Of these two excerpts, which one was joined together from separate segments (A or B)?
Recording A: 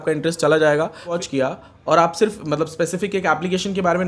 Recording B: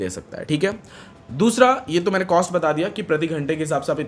A